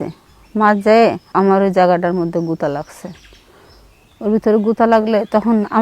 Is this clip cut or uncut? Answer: cut